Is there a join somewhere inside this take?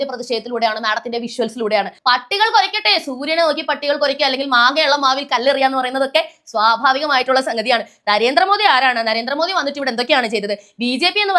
yes; 1 cut; at 1.9 s

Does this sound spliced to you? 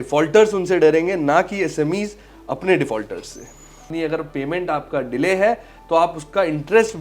yes; 1 cut; at 3.9 s

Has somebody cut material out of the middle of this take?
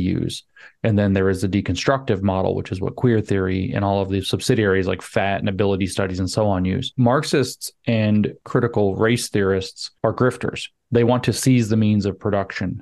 yes; 3 cuts; at 6.9 s, 8.4 s, 9.8 s

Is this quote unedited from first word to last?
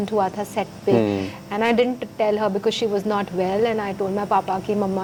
yes; 0 cuts

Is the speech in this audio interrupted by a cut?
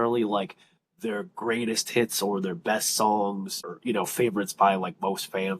yes; 1 cut; at 3.5 s

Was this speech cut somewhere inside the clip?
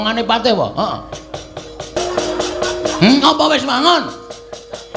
yes; 1 cut; at 2.0 s

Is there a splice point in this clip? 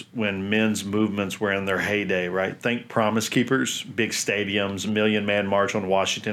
no; 0 cuts

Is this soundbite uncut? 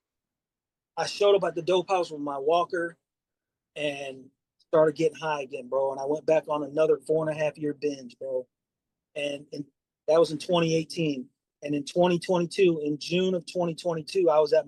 yes; 0 cuts

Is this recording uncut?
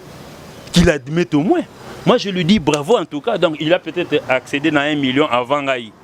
yes; 0 cuts

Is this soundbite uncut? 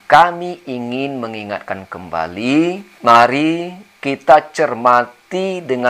no; 1 cut; at 2.9 s

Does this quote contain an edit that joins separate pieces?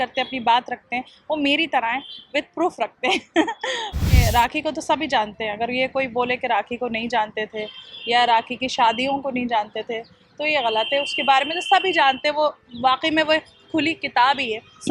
yes; 1 cut; at 4.2 s

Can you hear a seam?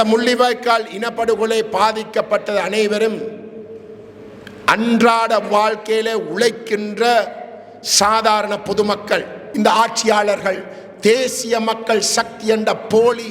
yes; 1 cut; at 9.4 s

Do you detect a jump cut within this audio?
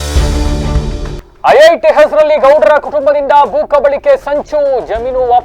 yes; 1 cut; at 1.2 s

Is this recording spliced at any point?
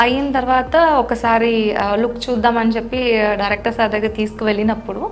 no; 0 cuts

